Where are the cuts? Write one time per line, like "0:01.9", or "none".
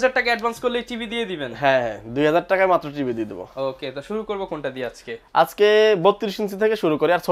none